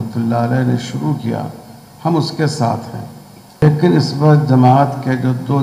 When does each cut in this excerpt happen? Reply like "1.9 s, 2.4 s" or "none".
3.6 s